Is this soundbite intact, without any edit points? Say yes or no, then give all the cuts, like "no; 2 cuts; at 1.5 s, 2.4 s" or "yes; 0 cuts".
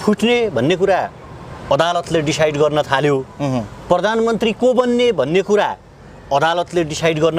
yes; 0 cuts